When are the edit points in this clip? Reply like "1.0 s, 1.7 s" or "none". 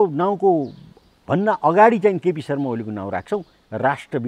none